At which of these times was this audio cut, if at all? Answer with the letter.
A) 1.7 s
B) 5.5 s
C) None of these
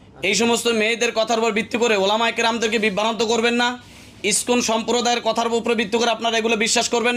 C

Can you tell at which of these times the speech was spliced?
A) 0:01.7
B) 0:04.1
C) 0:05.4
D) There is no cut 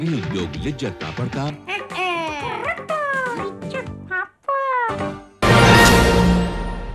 C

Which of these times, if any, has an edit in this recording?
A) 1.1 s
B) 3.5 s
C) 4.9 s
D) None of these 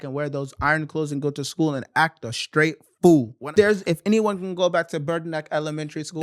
B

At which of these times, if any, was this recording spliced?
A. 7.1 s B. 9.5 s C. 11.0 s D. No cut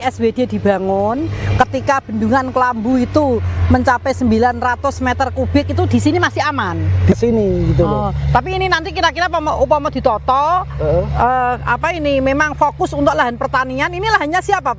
A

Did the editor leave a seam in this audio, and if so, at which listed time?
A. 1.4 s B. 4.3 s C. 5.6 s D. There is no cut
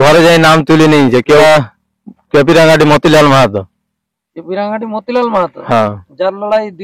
A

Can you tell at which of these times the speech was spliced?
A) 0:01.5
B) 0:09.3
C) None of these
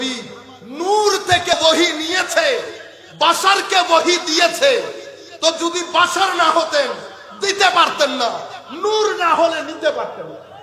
A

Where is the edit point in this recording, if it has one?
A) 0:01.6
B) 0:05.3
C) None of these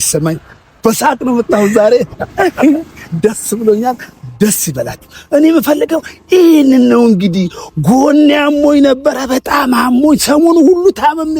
C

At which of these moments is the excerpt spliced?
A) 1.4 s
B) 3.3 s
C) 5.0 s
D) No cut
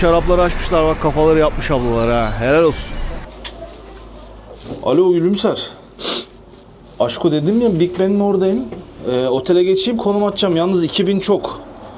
B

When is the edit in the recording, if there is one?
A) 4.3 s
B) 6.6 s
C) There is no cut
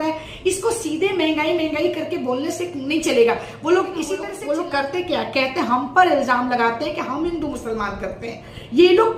A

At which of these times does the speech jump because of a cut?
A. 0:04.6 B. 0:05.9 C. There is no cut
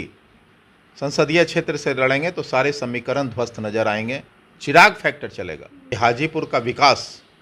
B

